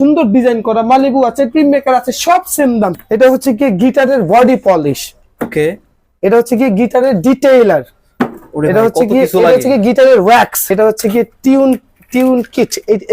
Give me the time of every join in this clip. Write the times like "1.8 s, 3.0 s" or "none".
3.0 s, 10.7 s